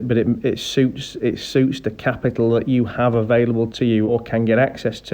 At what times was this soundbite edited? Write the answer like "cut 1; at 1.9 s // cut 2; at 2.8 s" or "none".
cut 1; at 4.1 s